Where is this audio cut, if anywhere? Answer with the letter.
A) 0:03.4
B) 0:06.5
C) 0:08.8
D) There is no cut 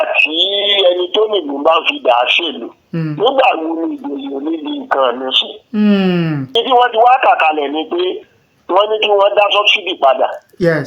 B